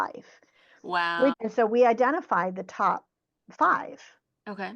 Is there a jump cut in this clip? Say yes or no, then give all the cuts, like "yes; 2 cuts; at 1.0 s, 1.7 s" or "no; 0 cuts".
yes; 1 cut; at 1.4 s